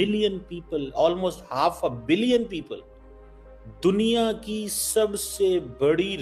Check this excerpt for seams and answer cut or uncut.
uncut